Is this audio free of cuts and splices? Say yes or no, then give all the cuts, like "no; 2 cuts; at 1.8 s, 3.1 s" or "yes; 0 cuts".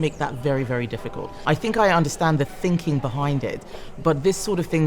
no; 1 cut; at 1.3 s